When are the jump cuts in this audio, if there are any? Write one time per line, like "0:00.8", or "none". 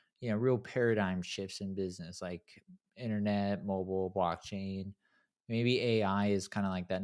none